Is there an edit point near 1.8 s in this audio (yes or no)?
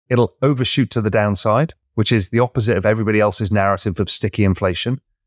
yes